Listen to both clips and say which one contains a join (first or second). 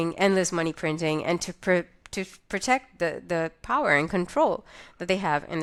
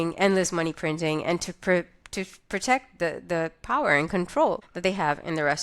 second